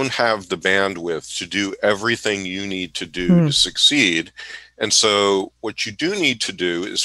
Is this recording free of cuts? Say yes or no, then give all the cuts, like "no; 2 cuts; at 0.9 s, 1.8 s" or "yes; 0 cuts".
yes; 0 cuts